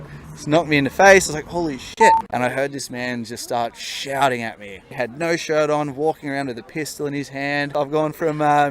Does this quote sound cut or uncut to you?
cut